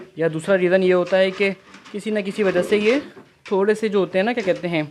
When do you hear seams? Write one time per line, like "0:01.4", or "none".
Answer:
none